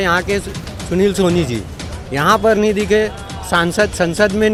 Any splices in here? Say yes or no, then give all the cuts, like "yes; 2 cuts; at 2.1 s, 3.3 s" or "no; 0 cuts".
no; 0 cuts